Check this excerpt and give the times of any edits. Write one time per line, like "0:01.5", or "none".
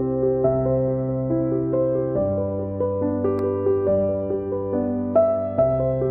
none